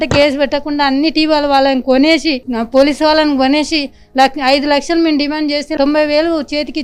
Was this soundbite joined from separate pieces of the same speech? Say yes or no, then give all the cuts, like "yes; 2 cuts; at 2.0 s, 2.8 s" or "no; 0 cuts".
no; 0 cuts